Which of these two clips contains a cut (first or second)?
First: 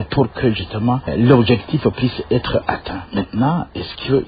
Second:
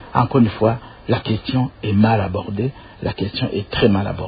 first